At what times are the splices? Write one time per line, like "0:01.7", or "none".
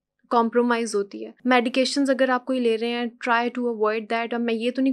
0:01.3